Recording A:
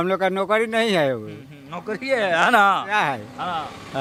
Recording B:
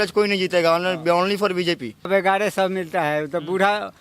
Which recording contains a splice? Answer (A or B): B